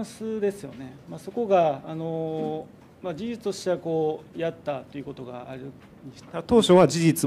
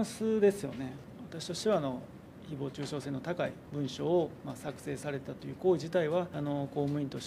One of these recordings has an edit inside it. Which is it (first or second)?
second